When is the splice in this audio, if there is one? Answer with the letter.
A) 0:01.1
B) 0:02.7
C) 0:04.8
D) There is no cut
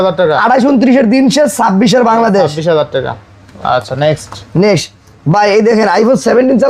D